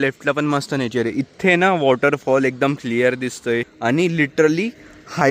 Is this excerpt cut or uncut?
cut